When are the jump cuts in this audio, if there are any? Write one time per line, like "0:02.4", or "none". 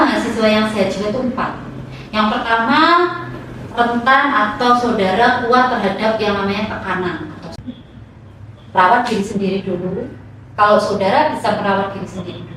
0:07.5

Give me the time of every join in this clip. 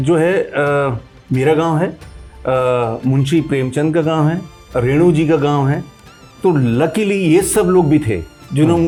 none

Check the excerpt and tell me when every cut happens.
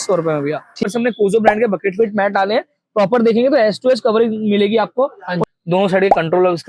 0:00.8
0:05.4

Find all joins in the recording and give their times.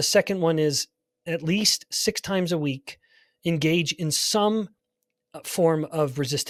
none

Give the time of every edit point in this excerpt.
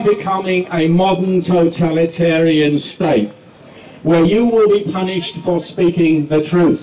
none

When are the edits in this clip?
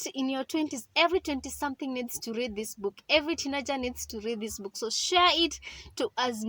none

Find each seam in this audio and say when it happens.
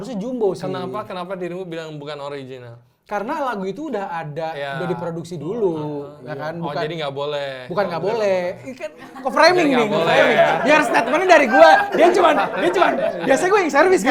none

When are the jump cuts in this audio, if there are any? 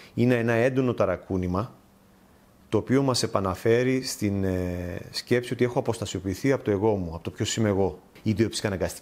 0:08.1

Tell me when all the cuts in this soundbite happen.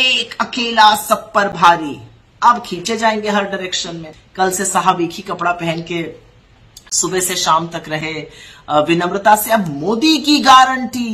0:04.2

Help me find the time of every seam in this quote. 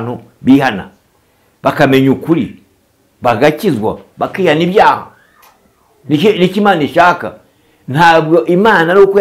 none

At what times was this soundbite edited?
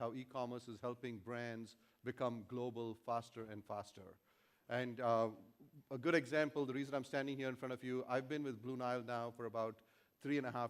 0:08.3

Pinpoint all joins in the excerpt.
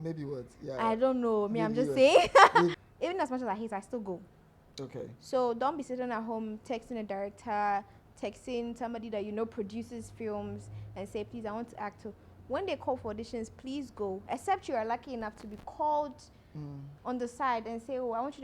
0:02.8

